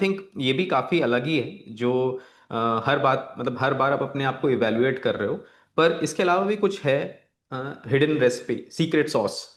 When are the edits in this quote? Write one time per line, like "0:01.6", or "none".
none